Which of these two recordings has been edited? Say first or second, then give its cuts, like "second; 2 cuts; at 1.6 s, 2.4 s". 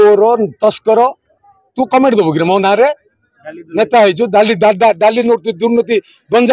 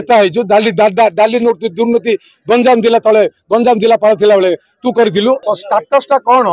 second; 1 cut; at 5.4 s